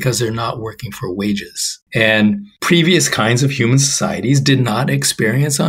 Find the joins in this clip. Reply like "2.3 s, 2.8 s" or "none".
none